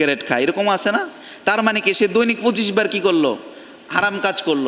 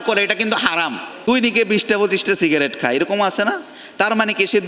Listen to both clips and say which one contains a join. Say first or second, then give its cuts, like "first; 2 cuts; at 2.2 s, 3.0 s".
second; 1 cut; at 1.1 s